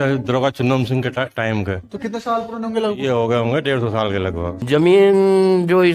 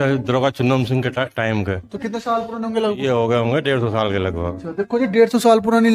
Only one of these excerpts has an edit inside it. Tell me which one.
first; 1 cut; at 4.5 s

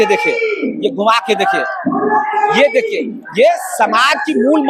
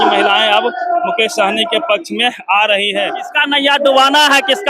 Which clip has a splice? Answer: second; 1 cut; at 2.7 s

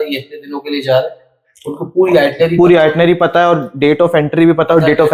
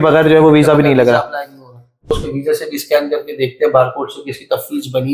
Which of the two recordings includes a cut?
second; 1 cut; at 2.2 s

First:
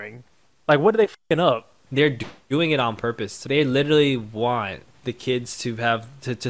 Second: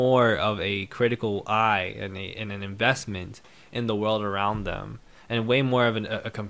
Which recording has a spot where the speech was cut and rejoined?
first; 3 cuts; at 1.8 s, 3.4 s, 4.8 s

